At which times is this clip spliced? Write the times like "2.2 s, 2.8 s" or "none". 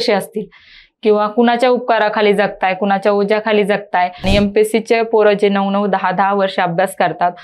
4.3 s